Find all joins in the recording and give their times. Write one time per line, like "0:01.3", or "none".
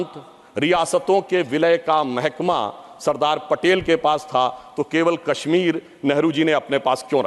none